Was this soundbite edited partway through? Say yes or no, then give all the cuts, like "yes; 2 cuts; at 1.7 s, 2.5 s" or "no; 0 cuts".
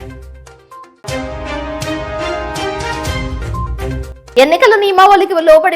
yes; 1 cut; at 4.1 s